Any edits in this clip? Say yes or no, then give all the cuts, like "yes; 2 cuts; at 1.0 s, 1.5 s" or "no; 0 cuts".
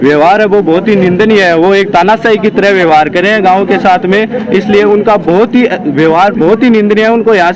no; 0 cuts